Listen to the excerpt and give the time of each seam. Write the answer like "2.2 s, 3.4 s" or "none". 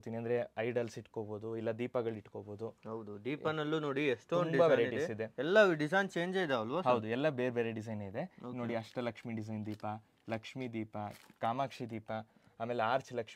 none